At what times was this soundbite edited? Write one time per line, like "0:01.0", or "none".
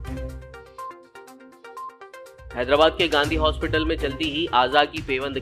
none